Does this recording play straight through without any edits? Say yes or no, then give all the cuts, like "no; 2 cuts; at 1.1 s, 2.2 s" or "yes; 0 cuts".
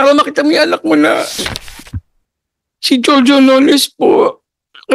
no; 1 cut; at 1.4 s